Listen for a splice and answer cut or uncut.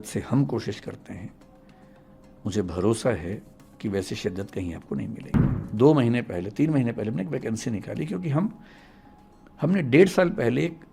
cut